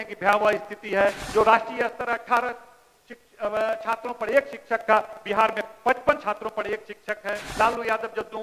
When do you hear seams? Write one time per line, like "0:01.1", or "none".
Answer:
0:01.2
0:07.5